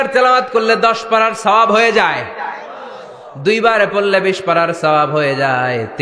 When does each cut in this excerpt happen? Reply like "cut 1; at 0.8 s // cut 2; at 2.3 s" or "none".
none